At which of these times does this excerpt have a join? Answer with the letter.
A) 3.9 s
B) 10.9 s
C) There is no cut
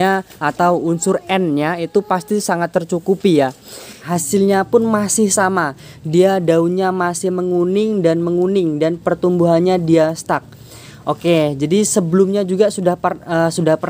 A